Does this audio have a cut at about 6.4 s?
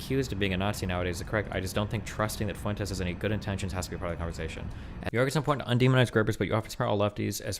no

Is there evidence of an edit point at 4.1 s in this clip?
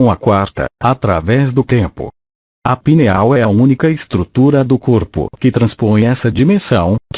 no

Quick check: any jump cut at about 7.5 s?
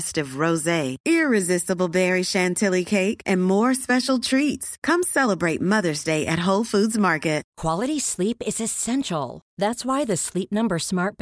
yes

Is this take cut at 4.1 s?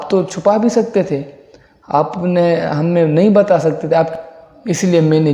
yes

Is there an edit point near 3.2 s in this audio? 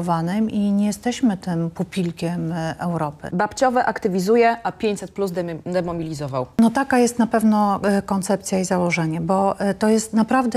yes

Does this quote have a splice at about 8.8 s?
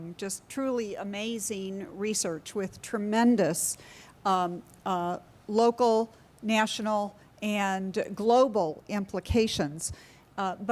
yes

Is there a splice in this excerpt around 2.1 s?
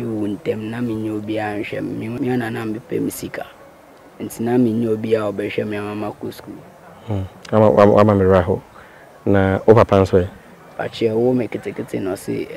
yes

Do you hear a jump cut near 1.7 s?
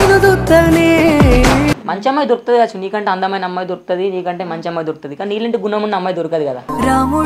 yes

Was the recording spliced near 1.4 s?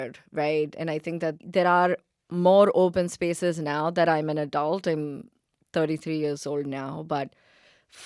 yes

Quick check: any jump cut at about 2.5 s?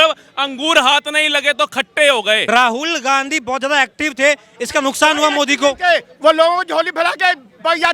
yes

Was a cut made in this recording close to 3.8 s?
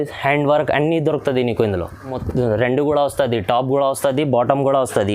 no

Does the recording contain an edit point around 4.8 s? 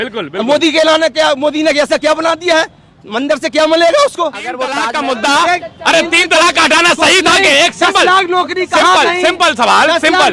yes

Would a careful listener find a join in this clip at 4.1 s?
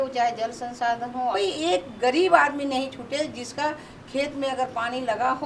no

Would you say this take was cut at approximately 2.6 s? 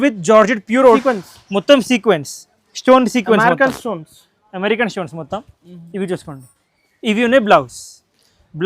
no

